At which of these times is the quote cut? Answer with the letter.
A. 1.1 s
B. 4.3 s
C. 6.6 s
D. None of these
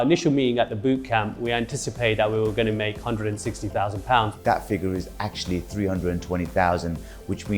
B